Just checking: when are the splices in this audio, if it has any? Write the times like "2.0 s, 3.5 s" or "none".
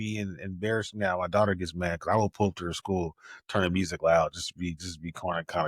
none